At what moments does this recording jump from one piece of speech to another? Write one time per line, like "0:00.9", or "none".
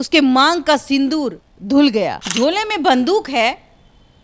0:02.2